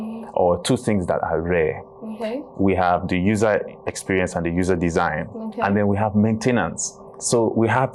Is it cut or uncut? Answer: uncut